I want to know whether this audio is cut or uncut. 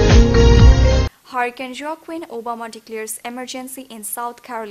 uncut